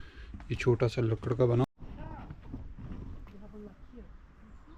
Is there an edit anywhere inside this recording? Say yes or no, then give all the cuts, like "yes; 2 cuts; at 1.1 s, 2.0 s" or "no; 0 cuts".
yes; 1 cut; at 1.6 s